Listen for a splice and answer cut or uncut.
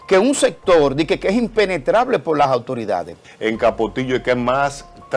cut